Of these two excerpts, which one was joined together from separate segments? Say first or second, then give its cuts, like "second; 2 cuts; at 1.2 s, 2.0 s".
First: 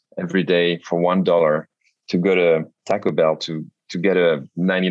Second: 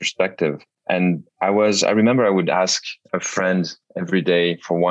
second; 1 cut; at 0.9 s